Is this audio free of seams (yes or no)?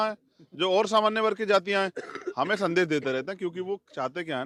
yes